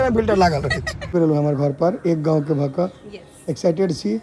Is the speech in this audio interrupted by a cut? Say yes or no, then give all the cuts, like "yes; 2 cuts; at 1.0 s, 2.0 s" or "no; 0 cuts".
yes; 1 cut; at 0.9 s